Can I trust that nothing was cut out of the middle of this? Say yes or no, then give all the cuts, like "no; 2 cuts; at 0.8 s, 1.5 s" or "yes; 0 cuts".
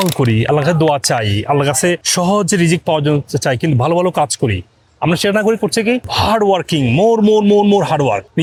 yes; 0 cuts